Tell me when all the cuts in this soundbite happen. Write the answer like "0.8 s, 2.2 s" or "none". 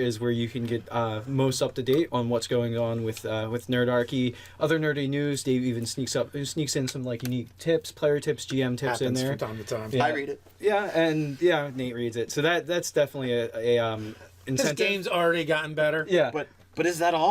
2.1 s